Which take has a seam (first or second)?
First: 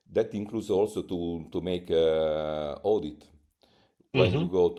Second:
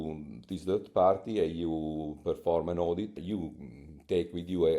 second